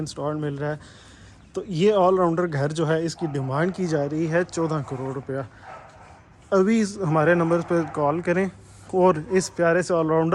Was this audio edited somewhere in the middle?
no; 0 cuts

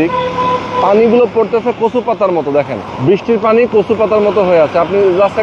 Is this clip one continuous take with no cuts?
no; 1 cut; at 2.8 s

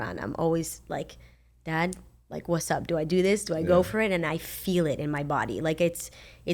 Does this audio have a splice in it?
no; 0 cuts

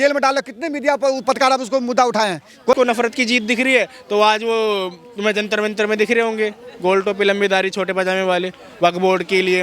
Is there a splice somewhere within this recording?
yes; 1 cut; at 2.7 s

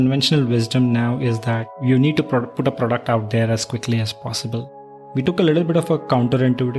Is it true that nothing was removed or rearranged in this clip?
no; 2 cuts; at 1.8 s, 5.1 s

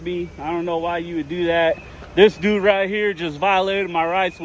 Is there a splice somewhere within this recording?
no; 0 cuts

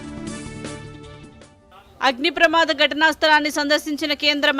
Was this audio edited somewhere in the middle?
yes; 1 cut; at 1.3 s

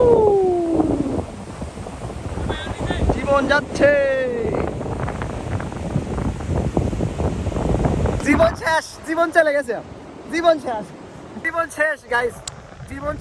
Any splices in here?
no; 0 cuts

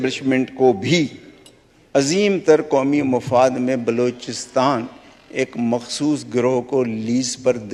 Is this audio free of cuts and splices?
yes; 0 cuts

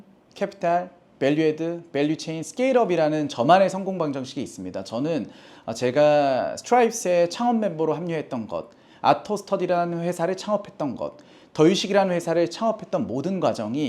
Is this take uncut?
yes; 0 cuts

